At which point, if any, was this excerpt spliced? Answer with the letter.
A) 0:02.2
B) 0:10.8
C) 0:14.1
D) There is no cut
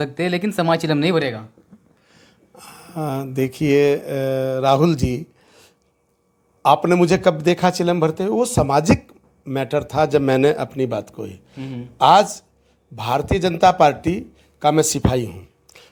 D